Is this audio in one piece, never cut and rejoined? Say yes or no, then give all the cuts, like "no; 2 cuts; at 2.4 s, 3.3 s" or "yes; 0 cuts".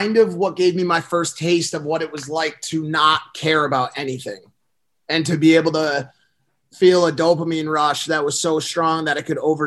yes; 0 cuts